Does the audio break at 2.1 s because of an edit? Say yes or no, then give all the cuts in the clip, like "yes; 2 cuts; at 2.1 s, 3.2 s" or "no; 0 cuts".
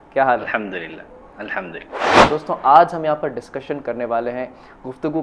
yes; 1 cut; at 2.1 s